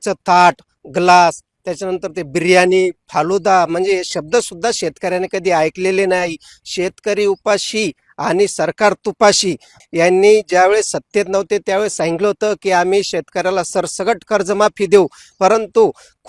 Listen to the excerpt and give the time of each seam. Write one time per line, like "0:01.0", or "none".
0:09.8